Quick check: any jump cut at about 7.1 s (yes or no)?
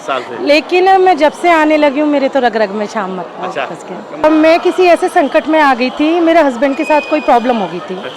no